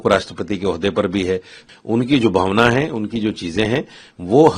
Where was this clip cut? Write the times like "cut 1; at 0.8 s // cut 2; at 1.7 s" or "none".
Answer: cut 1; at 1.6 s

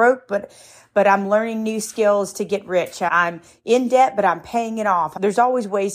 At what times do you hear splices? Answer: cut 1; at 3.1 s // cut 2; at 5.1 s

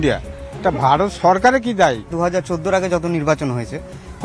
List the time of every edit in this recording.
cut 1; at 2.1 s

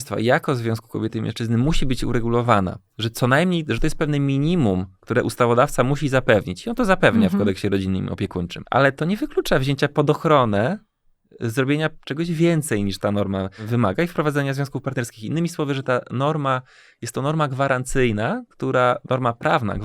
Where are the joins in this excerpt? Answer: cut 1; at 8.6 s // cut 2; at 13.6 s

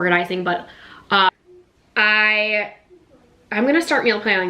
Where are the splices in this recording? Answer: cut 1; at 1.3 s

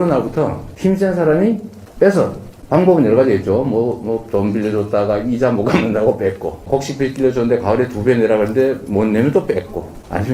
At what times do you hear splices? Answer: cut 1; at 6.6 s

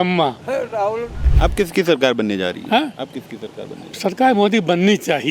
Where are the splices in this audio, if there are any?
cut 1; at 1.2 s

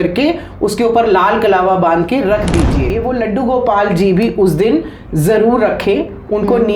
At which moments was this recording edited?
cut 1; at 3.0 s

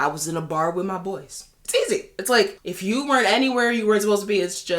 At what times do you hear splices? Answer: cut 1; at 2.6 s

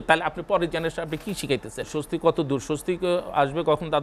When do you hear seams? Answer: cut 1; at 1.9 s

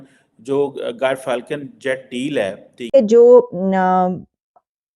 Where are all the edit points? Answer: cut 1; at 2.9 s

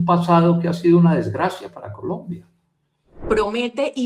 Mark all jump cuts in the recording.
cut 1; at 3.1 s

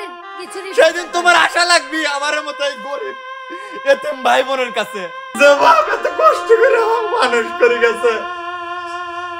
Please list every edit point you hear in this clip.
cut 1; at 5.2 s

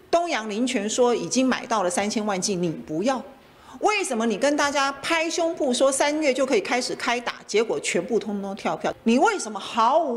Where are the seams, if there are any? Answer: cut 1; at 8.9 s

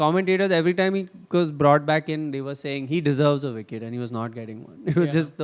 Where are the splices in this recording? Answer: none

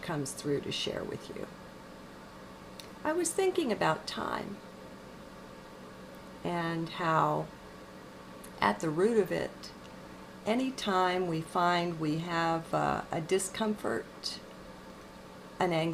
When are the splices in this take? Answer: none

